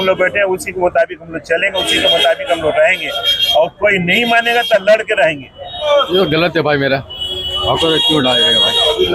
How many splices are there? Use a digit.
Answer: 1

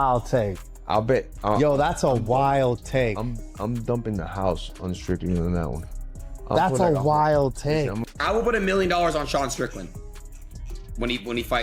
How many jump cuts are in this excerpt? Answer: 1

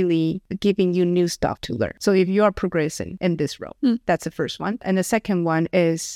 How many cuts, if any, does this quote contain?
0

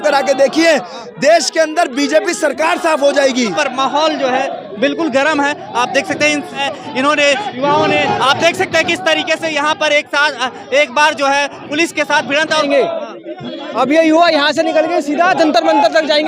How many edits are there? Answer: 3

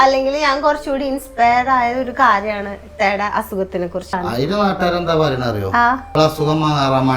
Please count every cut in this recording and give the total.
2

